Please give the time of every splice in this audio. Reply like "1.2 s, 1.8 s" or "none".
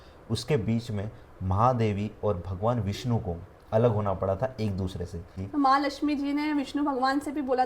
5.4 s

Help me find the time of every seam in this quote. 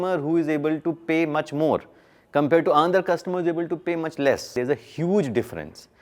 4.5 s

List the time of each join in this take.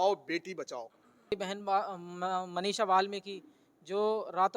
1.3 s

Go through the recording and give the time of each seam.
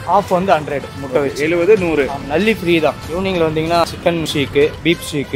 3.0 s, 4.1 s

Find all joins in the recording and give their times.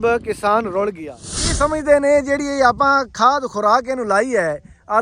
1.2 s

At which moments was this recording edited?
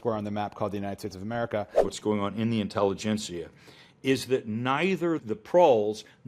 1.9 s, 5.2 s

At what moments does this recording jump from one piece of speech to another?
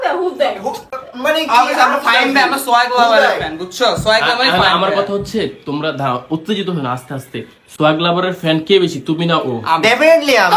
none

